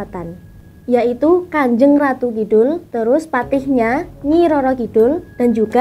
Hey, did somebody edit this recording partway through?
no; 0 cuts

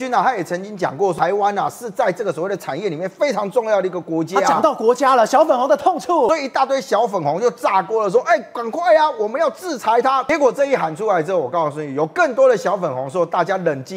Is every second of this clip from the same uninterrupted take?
no; 3 cuts; at 1.1 s, 6.3 s, 10.3 s

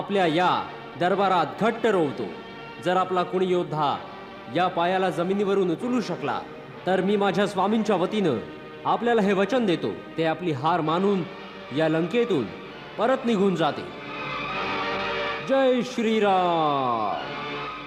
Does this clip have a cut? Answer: no; 0 cuts

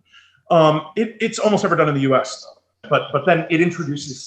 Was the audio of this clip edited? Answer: yes; 1 cut; at 2.7 s

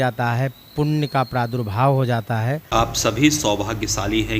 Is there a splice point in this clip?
yes; 1 cut; at 2.6 s

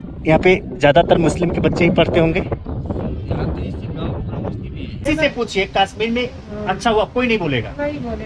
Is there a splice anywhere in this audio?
yes; 1 cut; at 5.1 s

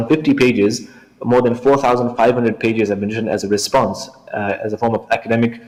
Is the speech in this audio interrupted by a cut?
no; 0 cuts

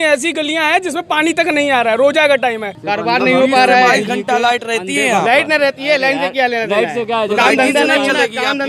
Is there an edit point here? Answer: no; 0 cuts

